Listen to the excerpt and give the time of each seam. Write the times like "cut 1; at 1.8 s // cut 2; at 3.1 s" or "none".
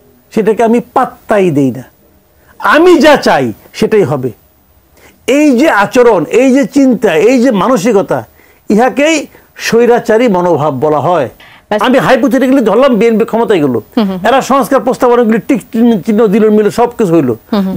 cut 1; at 11.8 s